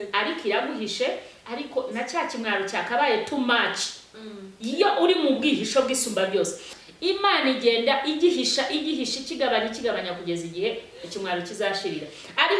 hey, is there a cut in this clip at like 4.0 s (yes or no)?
no